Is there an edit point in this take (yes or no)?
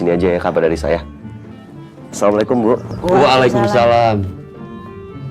yes